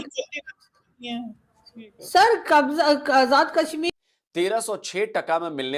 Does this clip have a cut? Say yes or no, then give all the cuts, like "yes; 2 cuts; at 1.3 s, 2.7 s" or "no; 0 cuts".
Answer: yes; 1 cut; at 3.9 s